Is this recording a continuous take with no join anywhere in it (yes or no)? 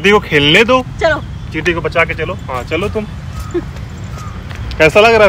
yes